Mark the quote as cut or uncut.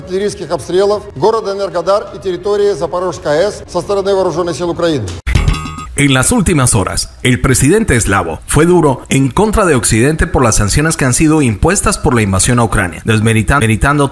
cut